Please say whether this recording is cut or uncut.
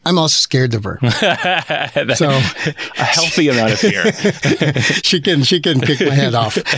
uncut